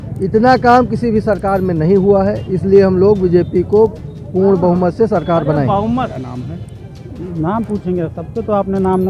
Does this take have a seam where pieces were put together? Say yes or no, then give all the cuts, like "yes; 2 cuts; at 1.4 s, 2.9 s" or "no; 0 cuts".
yes; 1 cut; at 6.1 s